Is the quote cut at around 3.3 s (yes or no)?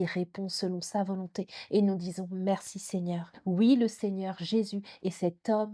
yes